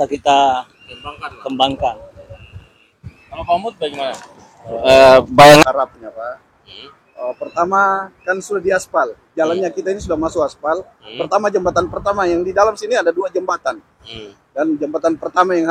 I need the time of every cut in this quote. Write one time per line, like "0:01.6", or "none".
0:05.6